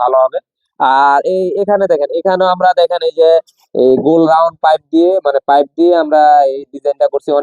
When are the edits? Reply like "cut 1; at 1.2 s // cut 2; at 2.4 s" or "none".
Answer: none